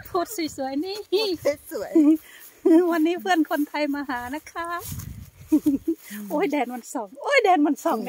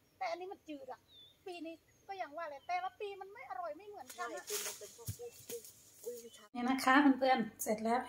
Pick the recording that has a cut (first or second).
second